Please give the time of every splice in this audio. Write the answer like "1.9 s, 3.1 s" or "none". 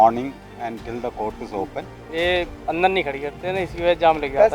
1.9 s